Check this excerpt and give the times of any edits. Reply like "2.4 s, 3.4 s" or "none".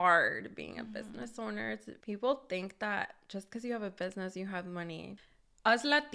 1.9 s, 5.1 s